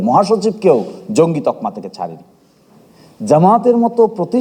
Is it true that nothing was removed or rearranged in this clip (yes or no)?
yes